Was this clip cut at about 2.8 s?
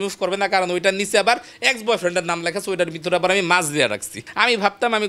no; 1 cut; at 4.1 s

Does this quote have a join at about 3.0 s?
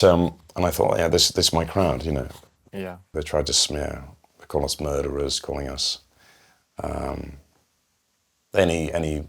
yes; 1 cut; at 3.0 s

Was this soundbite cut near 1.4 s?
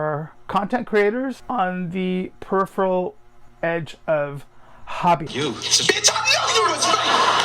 yes; 2 cuts; at 1.4 s, 5.3 s

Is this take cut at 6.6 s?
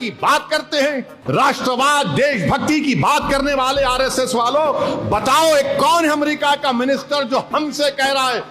no; 1 cut; at 1.1 s

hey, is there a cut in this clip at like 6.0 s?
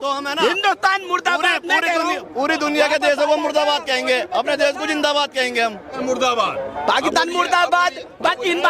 yes; 1 cut; at 6.0 s

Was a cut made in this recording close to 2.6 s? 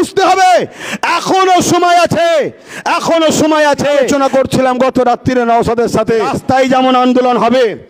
no; 2 cuts; at 4.1 s, 6.4 s

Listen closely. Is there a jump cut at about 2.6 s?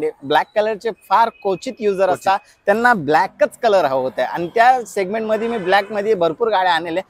no; 0 cuts

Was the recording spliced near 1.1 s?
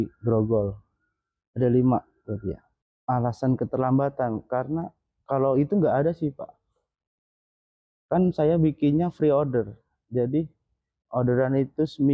no; 0 cuts

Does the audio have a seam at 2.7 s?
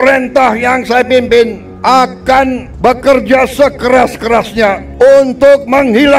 yes; 3 cuts; at 1.7 s, 2.7 s, 4.8 s

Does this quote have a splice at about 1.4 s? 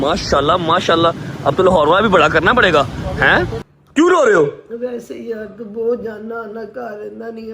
no; 1 cut; at 3.7 s

